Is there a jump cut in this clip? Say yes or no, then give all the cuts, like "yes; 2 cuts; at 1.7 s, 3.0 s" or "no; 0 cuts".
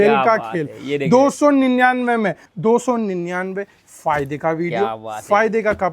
yes; 1 cut; at 2.4 s